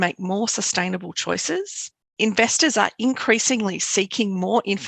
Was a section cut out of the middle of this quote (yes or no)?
no